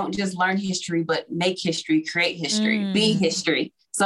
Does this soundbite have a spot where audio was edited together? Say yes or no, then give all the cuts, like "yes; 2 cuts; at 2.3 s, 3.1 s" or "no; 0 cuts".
yes; 1 cut; at 3.0 s